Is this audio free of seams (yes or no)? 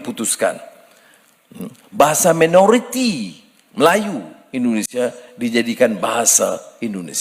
yes